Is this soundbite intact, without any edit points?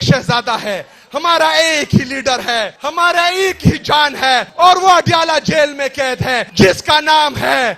no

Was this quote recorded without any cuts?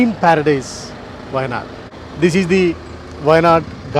yes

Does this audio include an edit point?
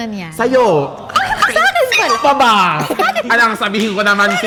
no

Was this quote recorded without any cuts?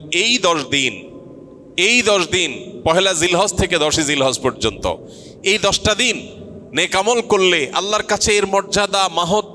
yes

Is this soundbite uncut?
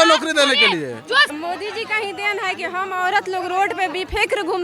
no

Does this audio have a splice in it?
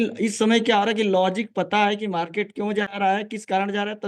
no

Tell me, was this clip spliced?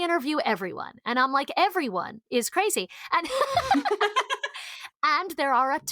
yes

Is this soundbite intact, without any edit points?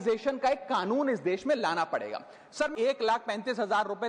no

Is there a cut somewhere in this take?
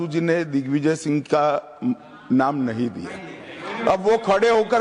no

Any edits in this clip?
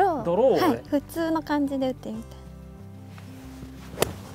no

